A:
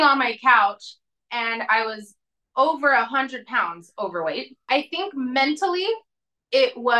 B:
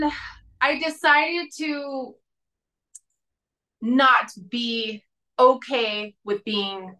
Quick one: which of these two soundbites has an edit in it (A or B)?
A